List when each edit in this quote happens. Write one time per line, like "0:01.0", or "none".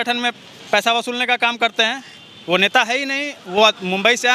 none